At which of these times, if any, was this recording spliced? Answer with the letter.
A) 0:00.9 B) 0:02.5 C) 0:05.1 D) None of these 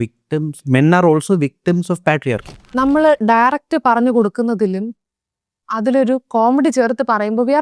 B